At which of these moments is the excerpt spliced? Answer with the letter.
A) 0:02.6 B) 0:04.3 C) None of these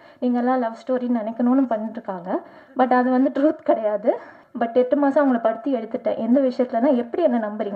B